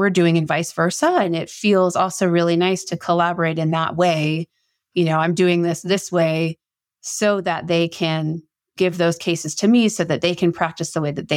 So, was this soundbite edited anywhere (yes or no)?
yes